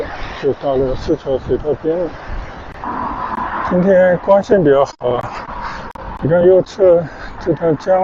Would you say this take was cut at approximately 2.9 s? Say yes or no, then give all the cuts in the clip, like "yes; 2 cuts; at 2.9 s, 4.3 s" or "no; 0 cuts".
yes; 1 cut; at 2.9 s